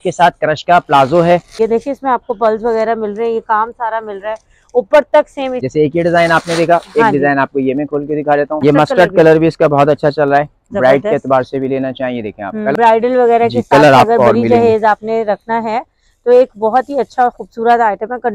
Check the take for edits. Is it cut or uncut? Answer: cut